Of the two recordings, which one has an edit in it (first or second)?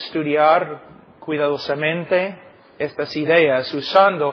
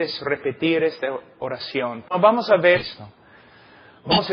second